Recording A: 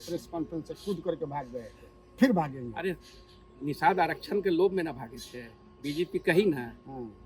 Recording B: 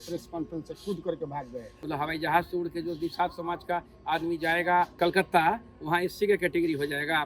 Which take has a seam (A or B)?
B